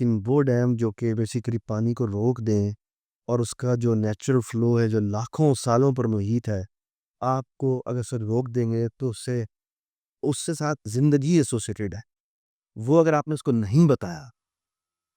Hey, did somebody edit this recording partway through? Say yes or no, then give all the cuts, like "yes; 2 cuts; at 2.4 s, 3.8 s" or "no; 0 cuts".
no; 0 cuts